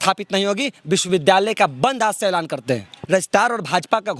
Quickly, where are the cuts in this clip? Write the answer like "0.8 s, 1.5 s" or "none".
2.9 s